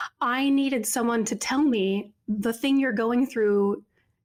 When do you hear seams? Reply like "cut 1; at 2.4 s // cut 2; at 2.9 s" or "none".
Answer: none